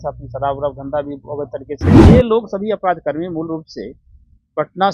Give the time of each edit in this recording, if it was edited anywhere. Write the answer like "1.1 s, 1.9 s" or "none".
1.7 s, 2.2 s